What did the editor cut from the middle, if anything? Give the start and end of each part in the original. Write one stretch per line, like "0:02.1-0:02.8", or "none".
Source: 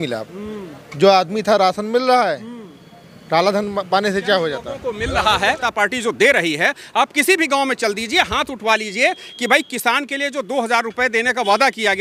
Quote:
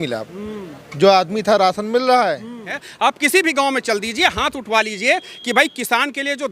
0:02.8-0:06.7